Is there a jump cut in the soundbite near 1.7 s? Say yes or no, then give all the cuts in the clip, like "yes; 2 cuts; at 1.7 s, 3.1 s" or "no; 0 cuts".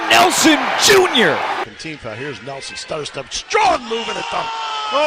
yes; 1 cut; at 1.7 s